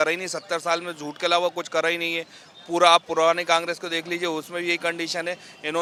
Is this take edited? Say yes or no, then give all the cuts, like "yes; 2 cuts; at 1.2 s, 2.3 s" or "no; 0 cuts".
no; 0 cuts